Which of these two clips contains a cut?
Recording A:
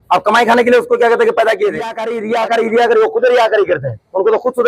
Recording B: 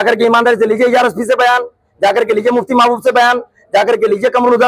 A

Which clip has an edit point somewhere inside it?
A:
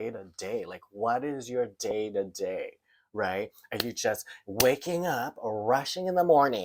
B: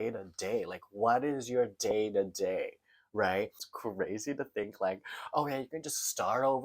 B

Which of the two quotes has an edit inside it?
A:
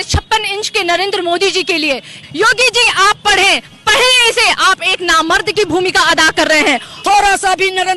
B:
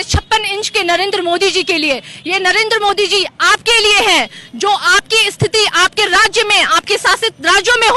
A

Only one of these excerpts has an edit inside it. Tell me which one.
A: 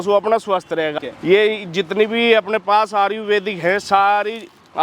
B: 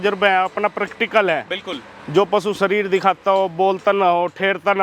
A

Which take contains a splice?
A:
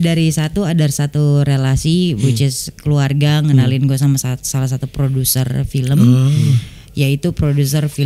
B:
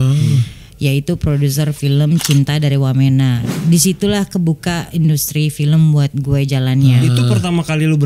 B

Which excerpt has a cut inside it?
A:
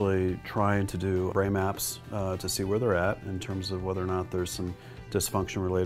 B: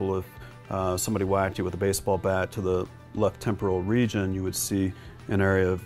A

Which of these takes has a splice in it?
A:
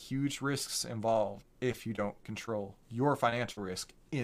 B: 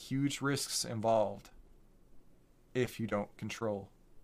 A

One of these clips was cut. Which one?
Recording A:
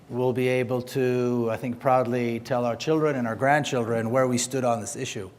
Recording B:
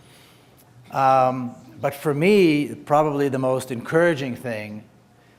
A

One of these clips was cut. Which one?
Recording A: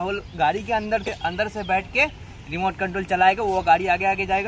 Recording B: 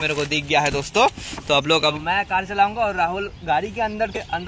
B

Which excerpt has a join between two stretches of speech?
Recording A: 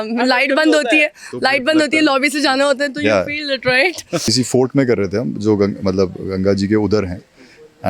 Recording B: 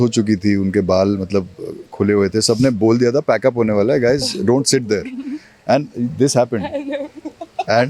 A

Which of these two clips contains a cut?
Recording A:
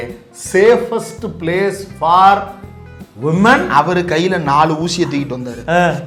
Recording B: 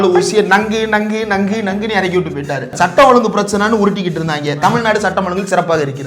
B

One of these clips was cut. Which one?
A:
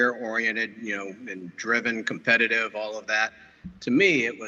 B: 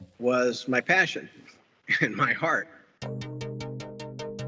B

